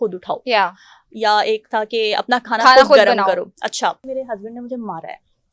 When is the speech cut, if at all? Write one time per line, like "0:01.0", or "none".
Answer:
0:04.0